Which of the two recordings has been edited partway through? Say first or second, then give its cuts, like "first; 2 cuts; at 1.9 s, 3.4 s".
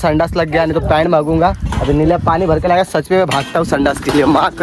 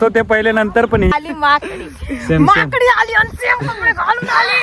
second; 1 cut; at 1.1 s